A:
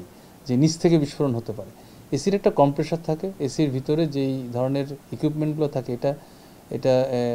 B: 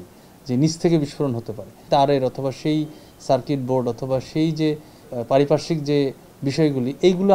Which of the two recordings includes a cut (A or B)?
B